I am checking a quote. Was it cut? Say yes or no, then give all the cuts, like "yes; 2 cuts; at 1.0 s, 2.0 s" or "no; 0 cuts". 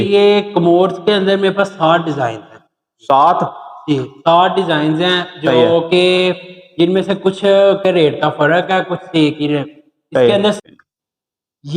yes; 1 cut; at 10.6 s